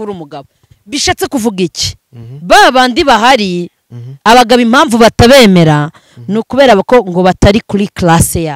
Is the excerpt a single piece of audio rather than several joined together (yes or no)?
yes